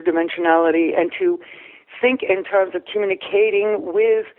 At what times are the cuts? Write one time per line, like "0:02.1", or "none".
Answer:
none